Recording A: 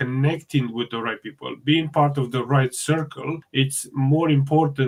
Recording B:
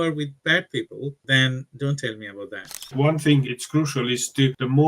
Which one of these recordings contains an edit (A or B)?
B